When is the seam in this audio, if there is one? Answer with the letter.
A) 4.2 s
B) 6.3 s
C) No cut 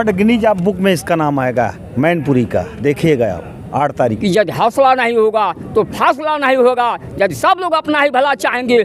A